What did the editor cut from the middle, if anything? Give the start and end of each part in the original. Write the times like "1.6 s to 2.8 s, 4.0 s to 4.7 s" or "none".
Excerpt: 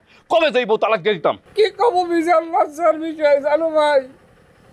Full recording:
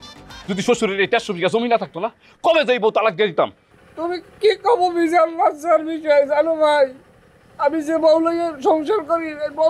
3.6 s to 4.3 s